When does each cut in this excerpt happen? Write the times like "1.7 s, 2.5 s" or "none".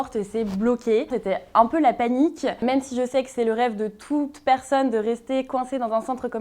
1.1 s

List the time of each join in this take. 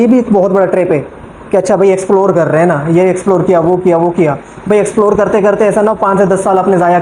none

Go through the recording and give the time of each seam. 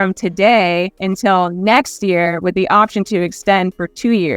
1.0 s

